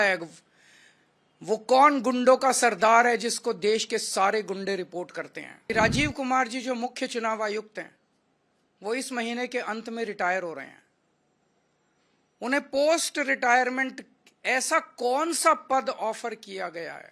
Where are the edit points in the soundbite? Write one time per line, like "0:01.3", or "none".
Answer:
0:05.5